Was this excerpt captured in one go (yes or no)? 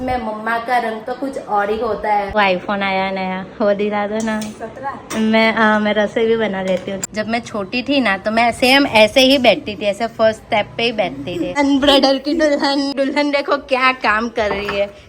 no